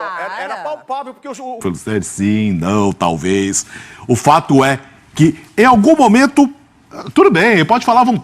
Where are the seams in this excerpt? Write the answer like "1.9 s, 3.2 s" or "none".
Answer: 1.6 s